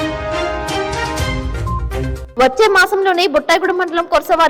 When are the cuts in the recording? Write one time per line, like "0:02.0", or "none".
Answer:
0:02.2